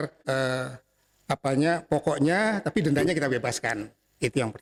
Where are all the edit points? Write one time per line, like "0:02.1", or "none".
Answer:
none